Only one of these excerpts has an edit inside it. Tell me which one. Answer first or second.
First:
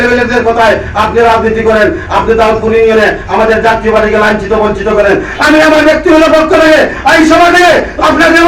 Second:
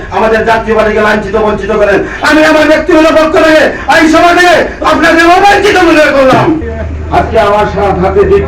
second